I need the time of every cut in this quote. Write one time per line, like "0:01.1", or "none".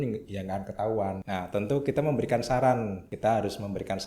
0:01.2
0:03.0